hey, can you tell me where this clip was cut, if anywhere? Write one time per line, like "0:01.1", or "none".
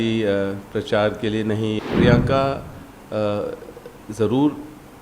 0:01.8